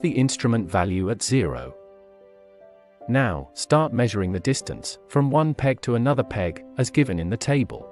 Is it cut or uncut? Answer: uncut